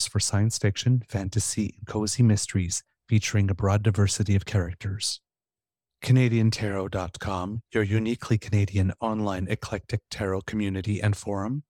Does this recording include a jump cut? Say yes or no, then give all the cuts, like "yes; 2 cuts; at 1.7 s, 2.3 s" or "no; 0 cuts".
no; 0 cuts